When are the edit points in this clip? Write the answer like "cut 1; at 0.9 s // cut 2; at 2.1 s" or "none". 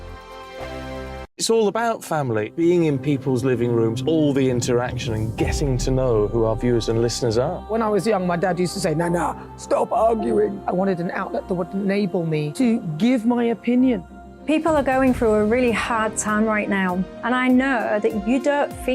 cut 1; at 1.3 s